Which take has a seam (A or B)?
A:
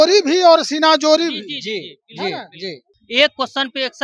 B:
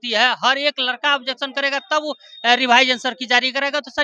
A